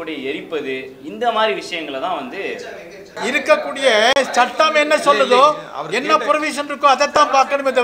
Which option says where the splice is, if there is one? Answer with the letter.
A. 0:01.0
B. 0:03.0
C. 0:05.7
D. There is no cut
B